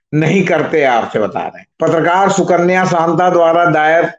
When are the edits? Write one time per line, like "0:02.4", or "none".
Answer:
0:01.6